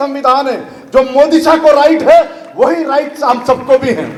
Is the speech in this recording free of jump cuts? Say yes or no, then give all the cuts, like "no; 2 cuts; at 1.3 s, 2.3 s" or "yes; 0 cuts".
yes; 0 cuts